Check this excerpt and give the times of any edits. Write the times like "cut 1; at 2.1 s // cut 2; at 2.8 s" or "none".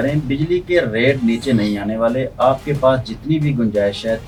none